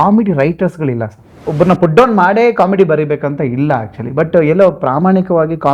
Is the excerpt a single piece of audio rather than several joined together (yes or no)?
no